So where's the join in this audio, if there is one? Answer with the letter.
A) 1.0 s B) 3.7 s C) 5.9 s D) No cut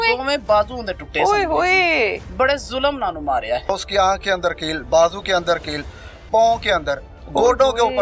B